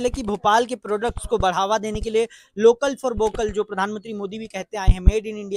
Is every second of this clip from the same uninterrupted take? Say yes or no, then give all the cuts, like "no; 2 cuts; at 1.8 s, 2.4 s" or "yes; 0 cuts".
yes; 0 cuts